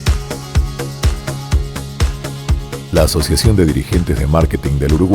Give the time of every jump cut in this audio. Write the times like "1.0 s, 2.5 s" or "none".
2.4 s